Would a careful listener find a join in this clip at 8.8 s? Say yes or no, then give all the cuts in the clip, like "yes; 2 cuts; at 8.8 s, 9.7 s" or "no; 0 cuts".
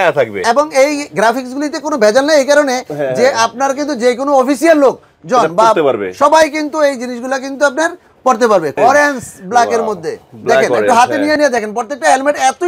yes; 1 cut; at 8.8 s